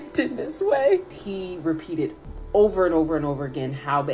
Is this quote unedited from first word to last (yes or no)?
no